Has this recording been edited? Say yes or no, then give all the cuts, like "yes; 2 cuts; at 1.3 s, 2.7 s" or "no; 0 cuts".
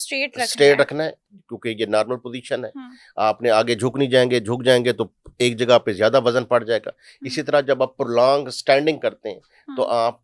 no; 0 cuts